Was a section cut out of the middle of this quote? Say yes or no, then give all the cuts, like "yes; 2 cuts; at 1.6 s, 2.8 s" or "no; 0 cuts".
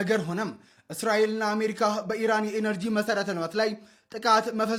no; 0 cuts